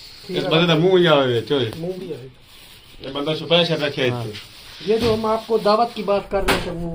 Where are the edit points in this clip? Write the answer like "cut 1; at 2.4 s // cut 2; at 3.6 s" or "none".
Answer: none